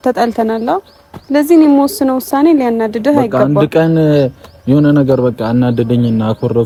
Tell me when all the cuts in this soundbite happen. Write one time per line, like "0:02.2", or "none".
none